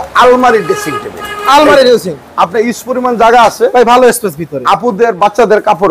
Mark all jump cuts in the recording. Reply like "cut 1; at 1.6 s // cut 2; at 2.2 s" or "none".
none